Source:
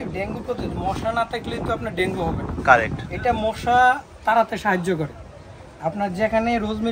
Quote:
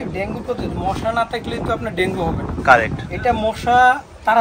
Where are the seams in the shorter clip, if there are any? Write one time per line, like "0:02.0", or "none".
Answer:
none